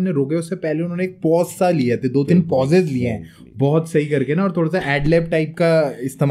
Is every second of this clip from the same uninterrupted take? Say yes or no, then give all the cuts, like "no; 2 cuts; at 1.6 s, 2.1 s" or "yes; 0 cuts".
yes; 0 cuts